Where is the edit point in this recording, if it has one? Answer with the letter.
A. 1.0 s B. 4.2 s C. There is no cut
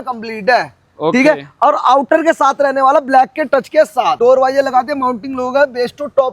B